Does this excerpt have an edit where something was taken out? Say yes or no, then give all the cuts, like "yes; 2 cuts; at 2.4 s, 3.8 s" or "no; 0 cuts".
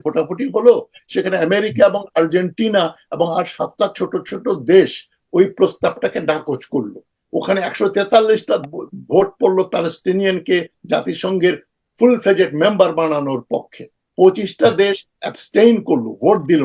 no; 0 cuts